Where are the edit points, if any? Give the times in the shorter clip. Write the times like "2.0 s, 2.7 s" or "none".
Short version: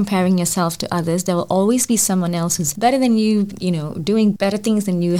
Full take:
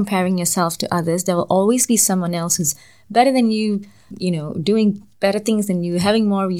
2.6 s, 3.6 s, 4.4 s